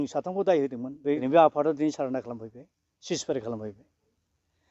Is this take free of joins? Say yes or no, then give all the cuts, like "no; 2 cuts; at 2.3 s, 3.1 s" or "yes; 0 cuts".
no; 1 cut; at 1.2 s